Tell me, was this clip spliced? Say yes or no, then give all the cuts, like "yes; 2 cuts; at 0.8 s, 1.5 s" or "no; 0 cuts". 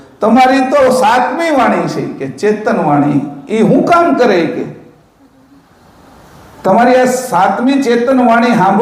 no; 0 cuts